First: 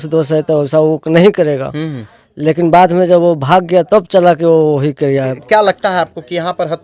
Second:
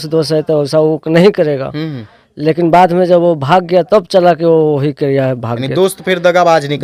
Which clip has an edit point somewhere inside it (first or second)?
first